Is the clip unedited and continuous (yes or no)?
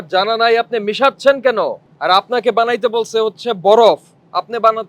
no